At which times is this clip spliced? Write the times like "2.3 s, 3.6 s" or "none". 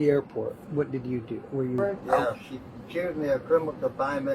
2.1 s